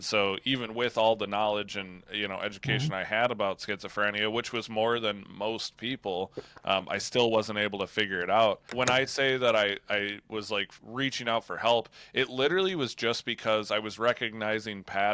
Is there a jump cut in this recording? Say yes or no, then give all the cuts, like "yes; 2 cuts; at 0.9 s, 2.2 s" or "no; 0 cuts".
yes; 1 cut; at 8.6 s